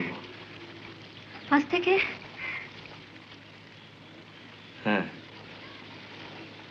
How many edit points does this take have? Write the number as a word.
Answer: zero